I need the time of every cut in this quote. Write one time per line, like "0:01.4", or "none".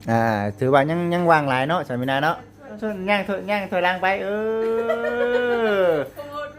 0:02.8